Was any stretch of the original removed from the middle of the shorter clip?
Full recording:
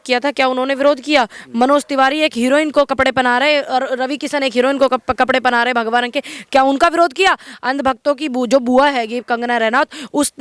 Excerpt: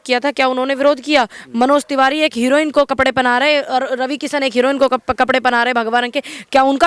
no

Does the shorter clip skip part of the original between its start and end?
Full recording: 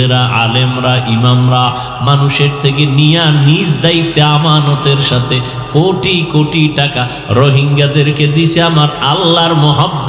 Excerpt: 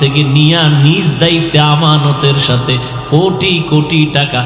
no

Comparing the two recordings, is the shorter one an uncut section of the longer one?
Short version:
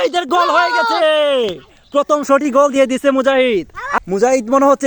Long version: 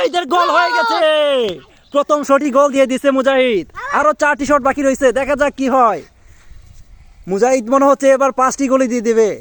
no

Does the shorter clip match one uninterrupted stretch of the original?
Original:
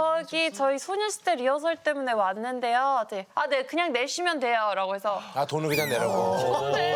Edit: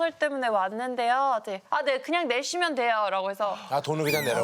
yes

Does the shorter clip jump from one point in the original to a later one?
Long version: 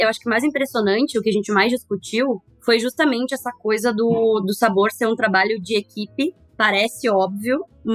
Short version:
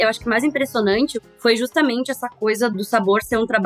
yes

